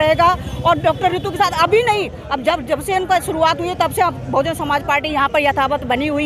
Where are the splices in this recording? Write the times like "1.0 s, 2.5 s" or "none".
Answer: none